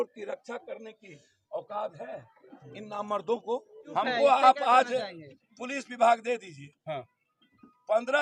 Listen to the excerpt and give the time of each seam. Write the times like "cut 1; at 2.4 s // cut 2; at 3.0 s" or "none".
cut 1; at 3.8 s